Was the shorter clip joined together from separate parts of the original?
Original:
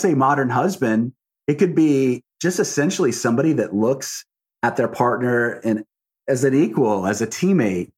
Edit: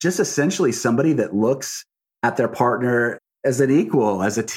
yes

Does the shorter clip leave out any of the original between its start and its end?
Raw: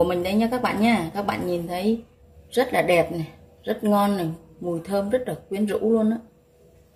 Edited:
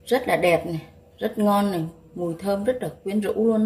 no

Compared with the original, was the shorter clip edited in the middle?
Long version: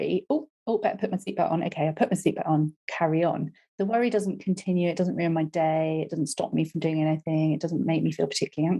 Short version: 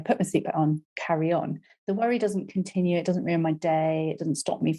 no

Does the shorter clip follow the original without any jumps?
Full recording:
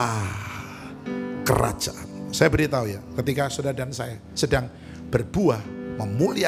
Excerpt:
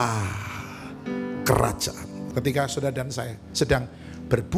no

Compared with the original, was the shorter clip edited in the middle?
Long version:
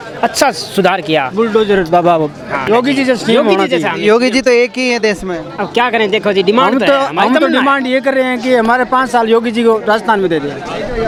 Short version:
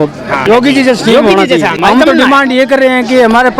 yes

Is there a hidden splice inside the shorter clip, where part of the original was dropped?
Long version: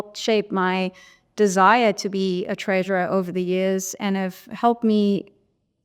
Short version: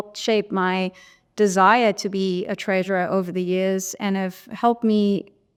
no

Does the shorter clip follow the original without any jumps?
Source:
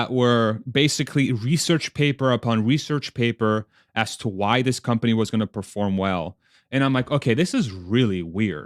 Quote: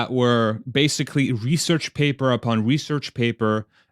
yes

